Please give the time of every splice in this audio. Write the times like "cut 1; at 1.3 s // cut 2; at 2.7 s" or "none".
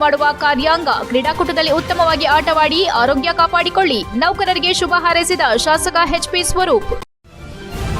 cut 1; at 7.1 s